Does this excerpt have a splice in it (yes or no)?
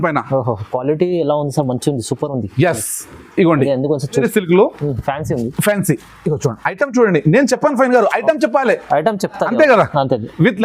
yes